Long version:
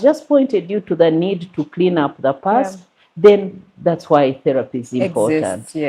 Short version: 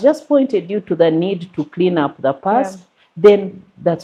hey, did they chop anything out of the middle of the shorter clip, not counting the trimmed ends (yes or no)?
no